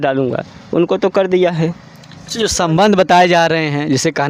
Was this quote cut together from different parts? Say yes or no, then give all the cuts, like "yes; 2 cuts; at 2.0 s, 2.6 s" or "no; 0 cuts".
no; 0 cuts